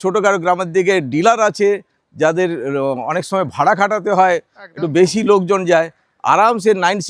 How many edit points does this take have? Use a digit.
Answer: 0